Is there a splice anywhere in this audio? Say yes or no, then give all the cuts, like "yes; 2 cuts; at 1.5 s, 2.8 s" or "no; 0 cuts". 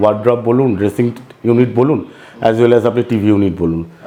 no; 0 cuts